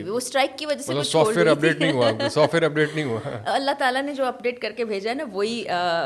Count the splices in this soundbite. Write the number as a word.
zero